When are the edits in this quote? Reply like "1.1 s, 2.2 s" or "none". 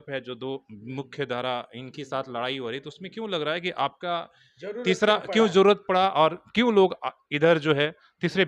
none